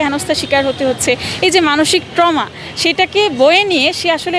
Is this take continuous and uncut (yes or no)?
yes